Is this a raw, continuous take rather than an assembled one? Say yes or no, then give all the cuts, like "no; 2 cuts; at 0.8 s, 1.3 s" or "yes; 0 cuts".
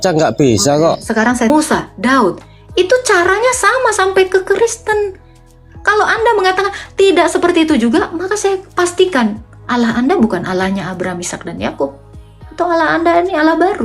no; 1 cut; at 1.5 s